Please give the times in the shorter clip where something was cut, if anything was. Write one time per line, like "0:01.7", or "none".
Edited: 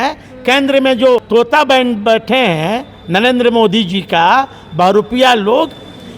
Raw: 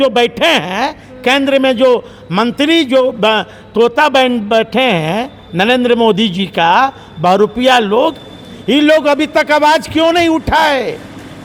0:01.2